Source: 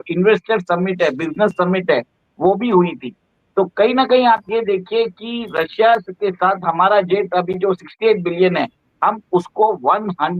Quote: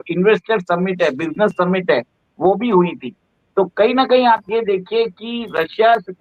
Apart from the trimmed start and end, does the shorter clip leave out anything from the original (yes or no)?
no